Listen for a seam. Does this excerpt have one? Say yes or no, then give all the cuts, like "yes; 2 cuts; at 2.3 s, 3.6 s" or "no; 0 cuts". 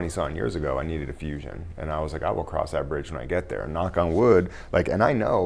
no; 0 cuts